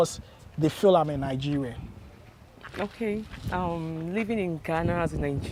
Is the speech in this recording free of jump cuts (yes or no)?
yes